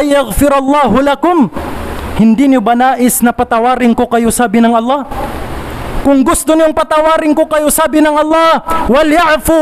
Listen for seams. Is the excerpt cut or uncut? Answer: uncut